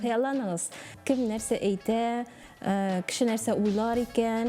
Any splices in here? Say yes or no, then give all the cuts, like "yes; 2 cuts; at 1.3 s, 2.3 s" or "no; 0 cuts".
yes; 1 cut; at 0.9 s